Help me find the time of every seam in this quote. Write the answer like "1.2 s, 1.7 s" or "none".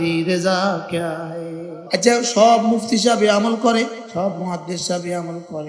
1.7 s, 4.0 s

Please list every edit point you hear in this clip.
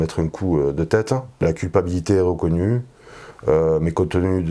1.4 s

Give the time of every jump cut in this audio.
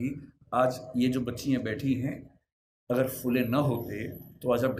none

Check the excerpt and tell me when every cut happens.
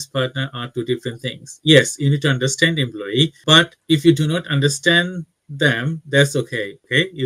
none

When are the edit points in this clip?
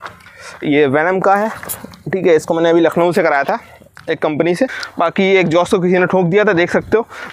4.7 s

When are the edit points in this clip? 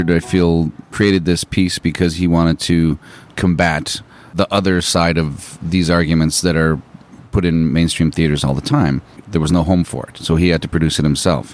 0.9 s, 3.3 s, 4.3 s, 9.2 s

